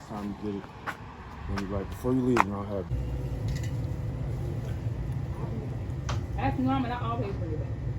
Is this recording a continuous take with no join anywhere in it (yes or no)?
no